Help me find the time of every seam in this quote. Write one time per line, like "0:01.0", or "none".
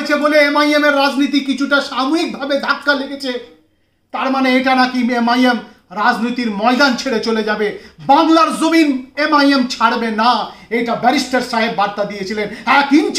none